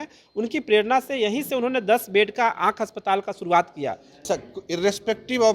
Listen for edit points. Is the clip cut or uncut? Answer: cut